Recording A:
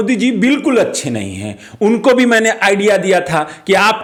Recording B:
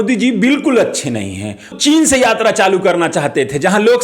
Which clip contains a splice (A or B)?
B